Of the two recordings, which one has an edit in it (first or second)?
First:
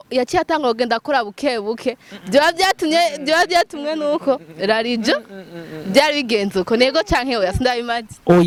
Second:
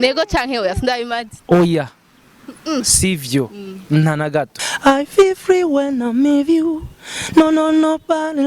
second